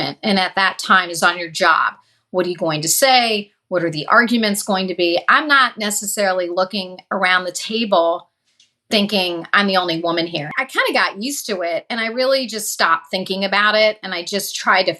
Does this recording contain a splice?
yes; 1 cut; at 10.6 s

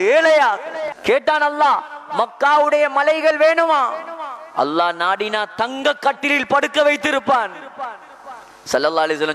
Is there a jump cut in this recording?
yes; 1 cut; at 0.9 s

